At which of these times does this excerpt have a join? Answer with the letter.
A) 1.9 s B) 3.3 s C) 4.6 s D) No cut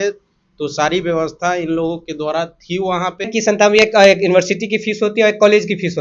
B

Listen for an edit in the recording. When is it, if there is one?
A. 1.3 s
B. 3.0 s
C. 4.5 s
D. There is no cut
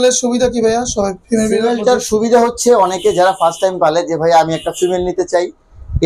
D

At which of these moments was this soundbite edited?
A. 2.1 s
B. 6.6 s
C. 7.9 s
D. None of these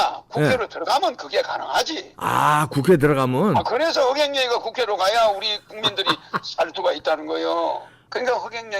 C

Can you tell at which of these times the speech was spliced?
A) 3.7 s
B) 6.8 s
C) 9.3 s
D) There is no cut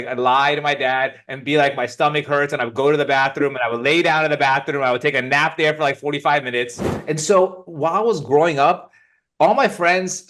B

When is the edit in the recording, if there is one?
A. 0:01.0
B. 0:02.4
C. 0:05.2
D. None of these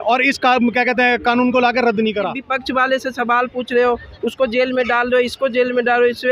B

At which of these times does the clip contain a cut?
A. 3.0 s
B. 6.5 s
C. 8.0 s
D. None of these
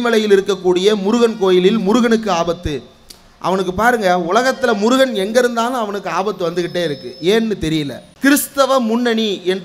C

